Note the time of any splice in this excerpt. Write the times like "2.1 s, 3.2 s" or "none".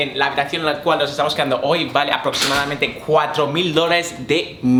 none